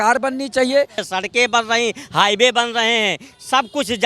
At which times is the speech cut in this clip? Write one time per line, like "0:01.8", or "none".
0:01.0